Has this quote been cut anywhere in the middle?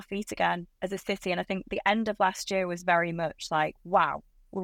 no; 0 cuts

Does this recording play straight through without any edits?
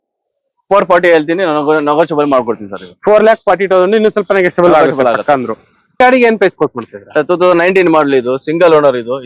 no; 1 cut; at 6.0 s

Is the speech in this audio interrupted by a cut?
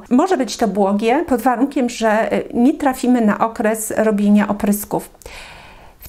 no; 0 cuts

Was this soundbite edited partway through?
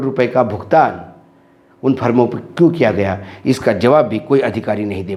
no; 0 cuts

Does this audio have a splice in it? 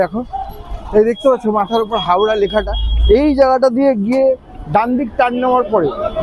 no; 0 cuts

